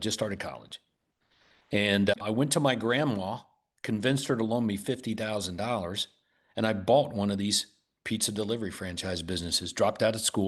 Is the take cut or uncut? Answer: cut